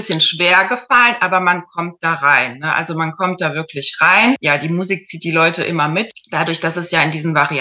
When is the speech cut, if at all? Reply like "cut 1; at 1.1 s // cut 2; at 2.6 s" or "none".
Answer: cut 1; at 4.4 s // cut 2; at 6.2 s